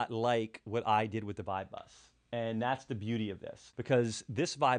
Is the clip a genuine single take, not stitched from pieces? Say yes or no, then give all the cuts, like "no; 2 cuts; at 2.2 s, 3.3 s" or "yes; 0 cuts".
yes; 0 cuts